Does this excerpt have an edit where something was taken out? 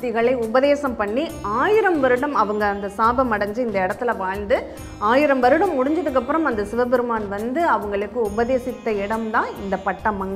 no; 0 cuts

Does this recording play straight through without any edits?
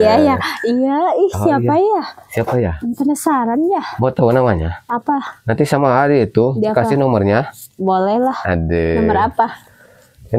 yes; 0 cuts

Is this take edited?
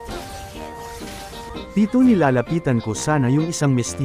yes; 1 cut; at 1.5 s

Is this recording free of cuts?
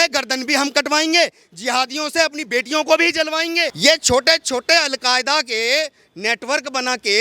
no; 1 cut; at 3.7 s

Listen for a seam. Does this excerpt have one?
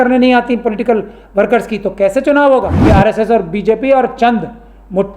yes; 1 cut; at 2.8 s

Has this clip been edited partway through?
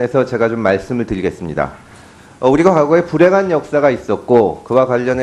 yes; 1 cut; at 1.0 s

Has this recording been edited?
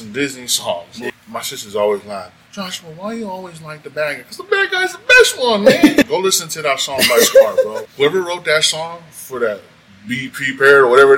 yes; 3 cuts; at 1.0 s, 6.1 s, 7.8 s

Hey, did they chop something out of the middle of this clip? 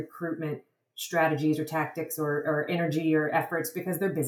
no; 0 cuts

